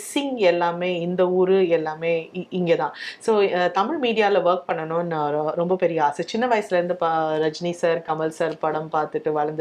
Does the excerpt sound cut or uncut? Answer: uncut